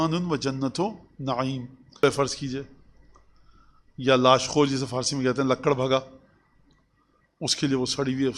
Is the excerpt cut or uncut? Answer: cut